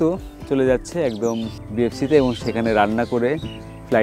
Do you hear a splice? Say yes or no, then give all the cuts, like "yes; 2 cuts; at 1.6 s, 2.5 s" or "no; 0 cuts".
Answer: yes; 1 cut; at 1.6 s